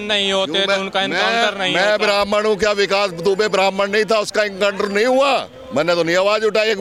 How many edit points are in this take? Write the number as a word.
zero